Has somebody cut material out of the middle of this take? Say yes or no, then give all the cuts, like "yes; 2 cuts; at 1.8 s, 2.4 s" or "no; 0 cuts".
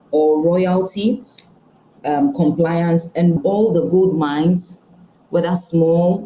yes; 1 cut; at 3.4 s